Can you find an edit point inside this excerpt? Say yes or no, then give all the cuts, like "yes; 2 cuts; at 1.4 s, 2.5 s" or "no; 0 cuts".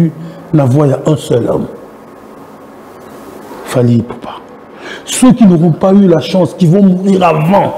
no; 0 cuts